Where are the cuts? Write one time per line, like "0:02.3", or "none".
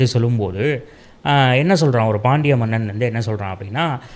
none